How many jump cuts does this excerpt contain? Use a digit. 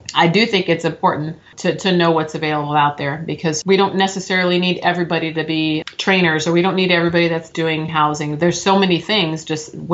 3